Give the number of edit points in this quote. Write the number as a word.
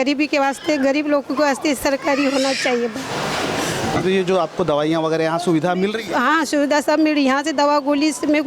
zero